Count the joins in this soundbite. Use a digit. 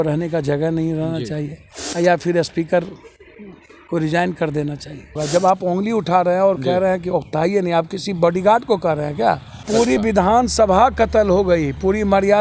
2